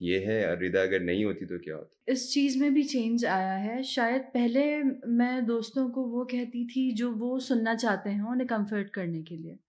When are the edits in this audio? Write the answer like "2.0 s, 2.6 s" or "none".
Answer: 1.9 s